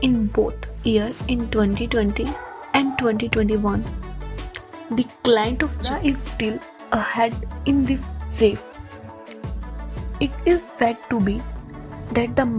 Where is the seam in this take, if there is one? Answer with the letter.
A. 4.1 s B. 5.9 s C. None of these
B